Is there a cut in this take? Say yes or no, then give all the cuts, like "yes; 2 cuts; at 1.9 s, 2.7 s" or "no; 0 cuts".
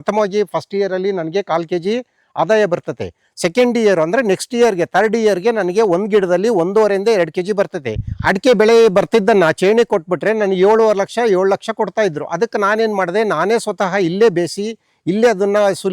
yes; 1 cut; at 8.1 s